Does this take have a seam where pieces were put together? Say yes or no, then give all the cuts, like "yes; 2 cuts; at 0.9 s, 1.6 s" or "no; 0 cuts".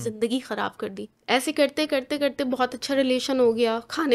yes; 1 cut; at 1.1 s